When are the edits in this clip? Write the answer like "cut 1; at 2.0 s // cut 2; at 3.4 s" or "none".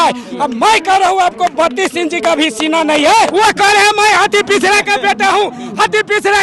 cut 1; at 3.3 s